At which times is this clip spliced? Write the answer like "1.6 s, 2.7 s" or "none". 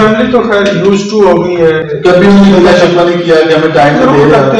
1.9 s